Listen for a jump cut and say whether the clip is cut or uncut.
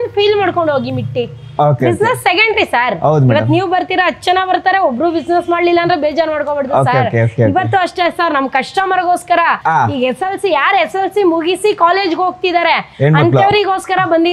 uncut